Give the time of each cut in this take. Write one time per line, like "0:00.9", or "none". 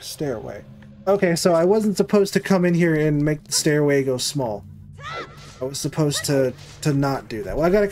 none